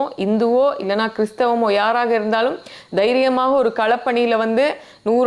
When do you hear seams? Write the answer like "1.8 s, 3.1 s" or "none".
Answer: none